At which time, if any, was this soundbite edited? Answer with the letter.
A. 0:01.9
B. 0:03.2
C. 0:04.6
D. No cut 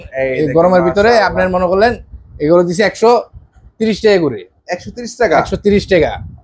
D